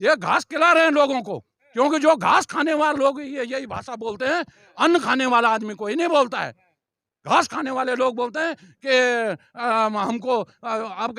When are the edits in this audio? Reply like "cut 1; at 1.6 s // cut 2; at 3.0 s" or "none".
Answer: none

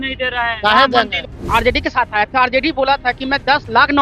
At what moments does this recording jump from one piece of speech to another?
cut 1; at 1.4 s

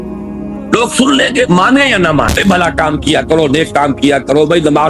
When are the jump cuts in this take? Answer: cut 1; at 2.3 s

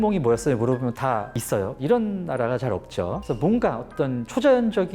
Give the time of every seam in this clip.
cut 1; at 1.7 s

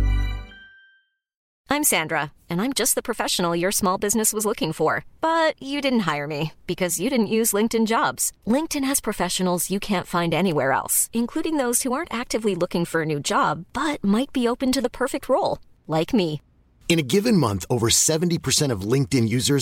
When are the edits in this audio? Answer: cut 1; at 1.4 s

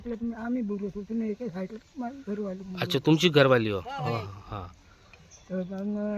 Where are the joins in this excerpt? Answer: none

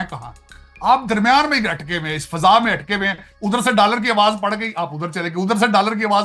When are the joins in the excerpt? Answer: none

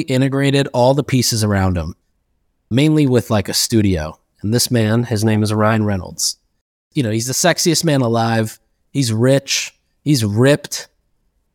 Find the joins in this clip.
cut 1; at 6.9 s

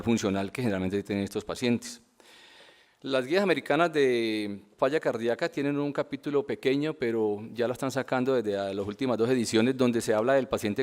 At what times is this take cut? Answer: cut 1; at 5.2 s

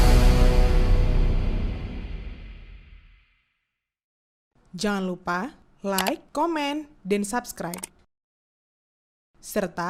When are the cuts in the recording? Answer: none

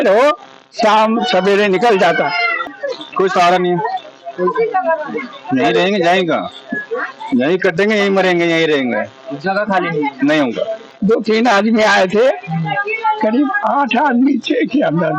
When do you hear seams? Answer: cut 1; at 2.5 s // cut 2; at 10.8 s

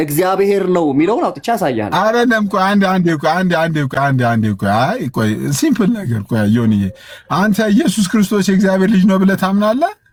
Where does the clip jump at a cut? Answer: none

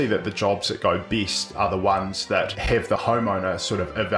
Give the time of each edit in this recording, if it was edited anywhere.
cut 1; at 2.8 s

